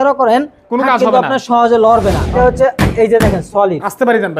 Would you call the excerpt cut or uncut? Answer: cut